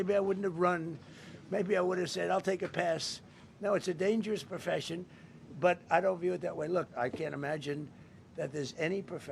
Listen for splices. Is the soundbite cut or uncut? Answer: cut